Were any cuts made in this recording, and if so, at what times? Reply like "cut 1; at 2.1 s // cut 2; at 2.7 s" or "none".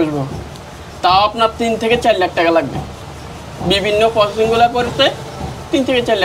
none